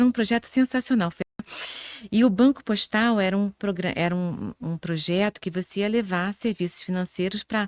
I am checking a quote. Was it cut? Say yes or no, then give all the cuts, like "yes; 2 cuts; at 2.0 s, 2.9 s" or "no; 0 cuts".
yes; 1 cut; at 1.4 s